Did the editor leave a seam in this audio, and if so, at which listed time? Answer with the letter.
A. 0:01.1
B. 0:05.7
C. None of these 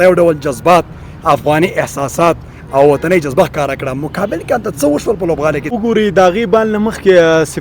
B